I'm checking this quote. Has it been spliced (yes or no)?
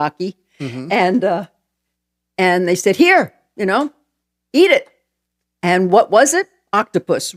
no